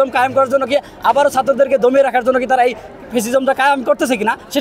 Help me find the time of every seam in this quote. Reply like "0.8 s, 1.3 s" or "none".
none